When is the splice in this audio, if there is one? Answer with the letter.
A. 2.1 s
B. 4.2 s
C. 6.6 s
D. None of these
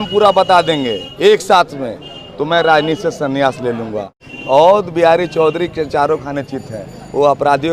B